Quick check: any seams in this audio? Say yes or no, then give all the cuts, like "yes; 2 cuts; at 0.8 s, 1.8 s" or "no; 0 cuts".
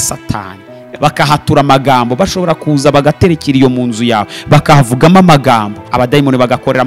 yes; 2 cuts; at 0.9 s, 5.8 s